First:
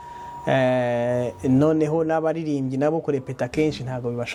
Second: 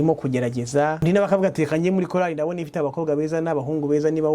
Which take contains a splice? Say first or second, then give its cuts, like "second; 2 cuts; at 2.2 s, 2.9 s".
second; 1 cut; at 1.0 s